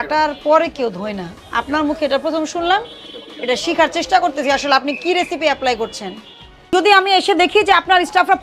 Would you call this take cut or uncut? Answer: cut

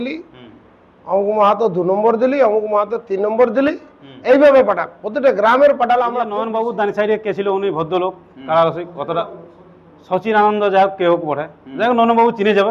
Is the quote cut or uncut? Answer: cut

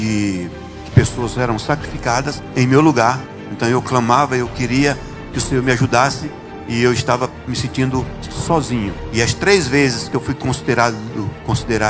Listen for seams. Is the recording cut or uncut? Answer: cut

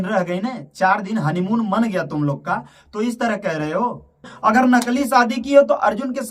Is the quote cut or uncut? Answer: cut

